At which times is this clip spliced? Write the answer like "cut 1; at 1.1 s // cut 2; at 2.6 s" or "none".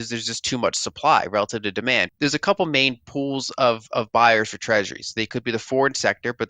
cut 1; at 2.1 s